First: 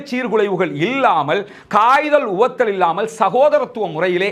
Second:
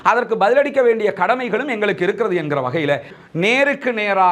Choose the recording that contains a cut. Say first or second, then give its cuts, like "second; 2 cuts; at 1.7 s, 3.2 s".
second; 1 cut; at 3.1 s